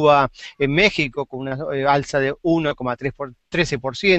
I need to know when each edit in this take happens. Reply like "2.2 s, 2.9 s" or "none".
none